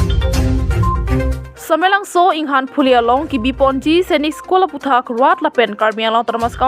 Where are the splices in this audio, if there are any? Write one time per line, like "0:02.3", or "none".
0:01.5

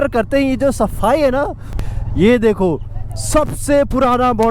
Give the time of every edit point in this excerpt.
0:01.8

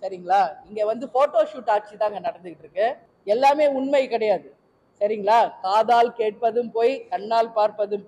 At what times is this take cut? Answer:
0:03.1

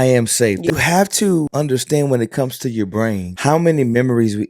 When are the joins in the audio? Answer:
0:00.7
0:01.5
0:03.3

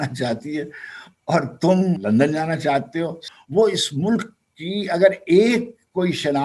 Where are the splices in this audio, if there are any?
0:02.0
0:03.2

